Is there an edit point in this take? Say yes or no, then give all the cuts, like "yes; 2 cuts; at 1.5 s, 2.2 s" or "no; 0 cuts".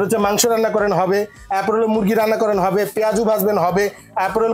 no; 0 cuts